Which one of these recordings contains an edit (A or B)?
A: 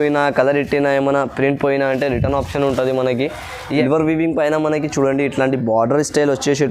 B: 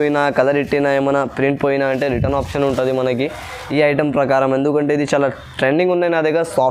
A